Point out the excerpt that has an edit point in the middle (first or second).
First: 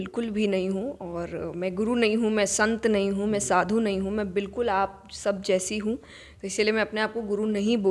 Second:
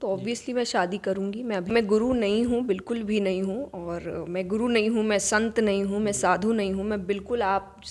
second